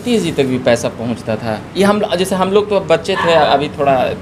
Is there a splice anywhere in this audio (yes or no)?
no